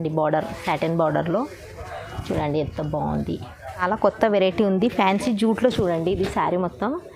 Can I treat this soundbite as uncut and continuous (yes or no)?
no